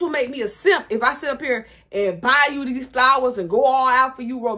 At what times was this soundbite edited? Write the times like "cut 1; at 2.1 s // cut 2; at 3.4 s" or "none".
none